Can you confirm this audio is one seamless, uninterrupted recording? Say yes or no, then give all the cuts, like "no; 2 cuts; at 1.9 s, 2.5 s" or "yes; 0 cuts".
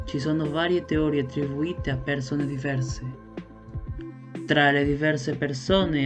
no; 2 cuts; at 3.0 s, 4.5 s